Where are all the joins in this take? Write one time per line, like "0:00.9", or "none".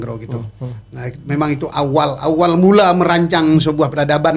none